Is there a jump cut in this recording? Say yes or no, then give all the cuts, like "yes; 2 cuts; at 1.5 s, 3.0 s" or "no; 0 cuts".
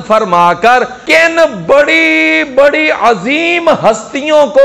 yes; 1 cut; at 1.0 s